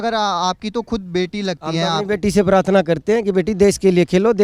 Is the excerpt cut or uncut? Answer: uncut